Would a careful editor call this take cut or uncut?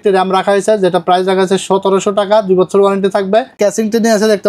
cut